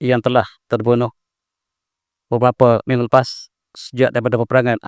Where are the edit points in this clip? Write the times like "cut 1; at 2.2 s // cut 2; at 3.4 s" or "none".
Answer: none